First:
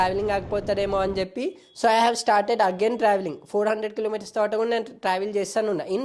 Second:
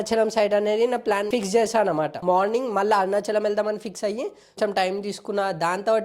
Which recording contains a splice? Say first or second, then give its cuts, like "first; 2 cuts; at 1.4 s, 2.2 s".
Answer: second; 1 cut; at 4.6 s